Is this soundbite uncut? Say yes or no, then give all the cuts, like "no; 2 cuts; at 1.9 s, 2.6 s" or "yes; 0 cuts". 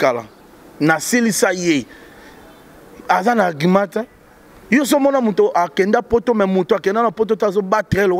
yes; 0 cuts